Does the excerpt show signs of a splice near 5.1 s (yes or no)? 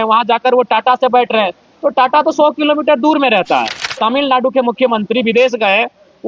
no